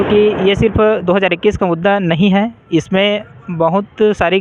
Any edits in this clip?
no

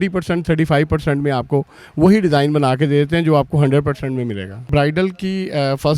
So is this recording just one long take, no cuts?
no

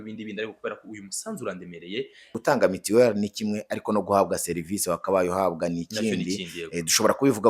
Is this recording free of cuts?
no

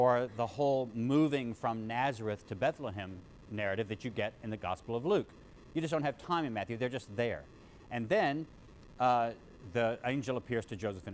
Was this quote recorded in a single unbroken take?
no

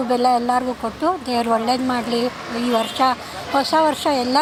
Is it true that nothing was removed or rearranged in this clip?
yes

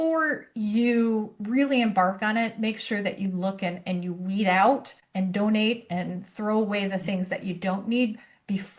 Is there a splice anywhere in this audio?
no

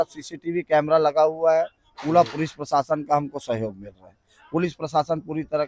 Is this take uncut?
yes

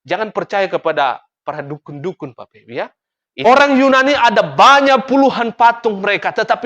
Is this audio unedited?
no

